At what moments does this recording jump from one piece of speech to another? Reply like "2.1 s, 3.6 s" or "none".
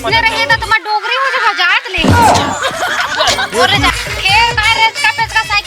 3.9 s